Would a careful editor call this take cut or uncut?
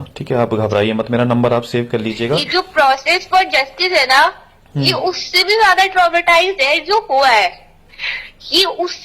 cut